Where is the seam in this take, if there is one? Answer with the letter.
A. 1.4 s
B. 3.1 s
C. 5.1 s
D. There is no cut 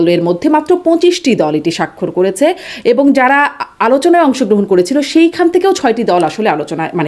D